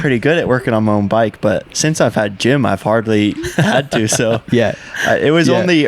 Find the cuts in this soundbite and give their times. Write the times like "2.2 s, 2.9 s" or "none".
none